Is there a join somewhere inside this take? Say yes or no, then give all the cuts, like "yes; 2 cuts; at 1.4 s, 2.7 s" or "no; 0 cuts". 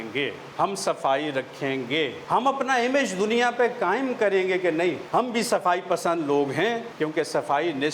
yes; 3 cuts; at 2.2 s, 5.0 s, 6.9 s